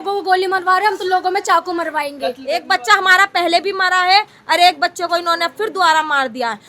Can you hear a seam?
yes; 1 cut; at 2.5 s

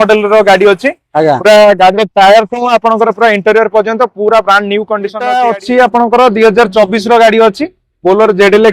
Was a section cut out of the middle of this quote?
yes; 1 cut; at 5.2 s

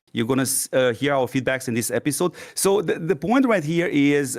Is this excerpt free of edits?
no; 1 cut; at 2.5 s

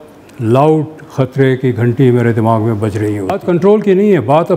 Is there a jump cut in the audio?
yes; 1 cut; at 3.3 s

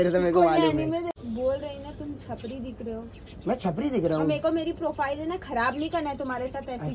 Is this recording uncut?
no; 1 cut; at 1.2 s

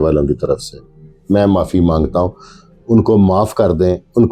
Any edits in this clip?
no; 0 cuts

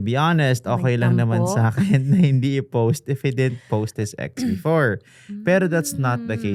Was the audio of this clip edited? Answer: no; 0 cuts

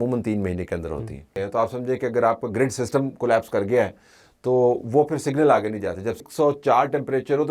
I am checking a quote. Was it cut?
yes; 2 cuts; at 1.4 s, 6.3 s

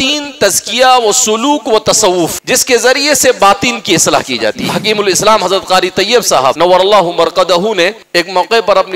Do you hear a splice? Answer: yes; 4 cuts; at 2.4 s, 4.7 s, 6.6 s, 8.0 s

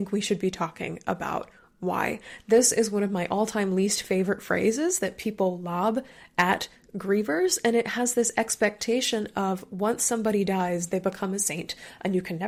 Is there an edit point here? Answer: no; 0 cuts

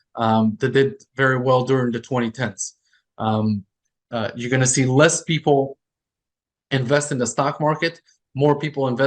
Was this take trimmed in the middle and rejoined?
no; 0 cuts

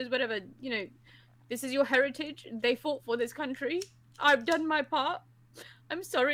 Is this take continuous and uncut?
yes; 0 cuts

